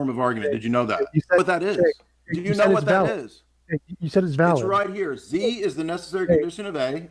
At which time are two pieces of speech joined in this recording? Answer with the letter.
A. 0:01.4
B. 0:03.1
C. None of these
A